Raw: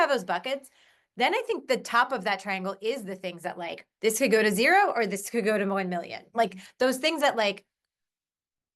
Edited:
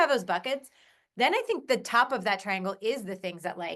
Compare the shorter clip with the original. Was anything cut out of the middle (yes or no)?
no